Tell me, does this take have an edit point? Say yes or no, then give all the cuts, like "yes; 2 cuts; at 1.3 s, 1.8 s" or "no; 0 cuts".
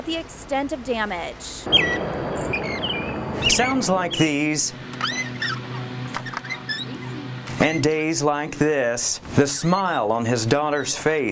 yes; 1 cut; at 1.7 s